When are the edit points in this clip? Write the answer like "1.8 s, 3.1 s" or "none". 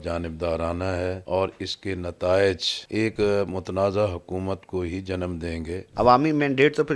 1.2 s, 3.1 s, 5.9 s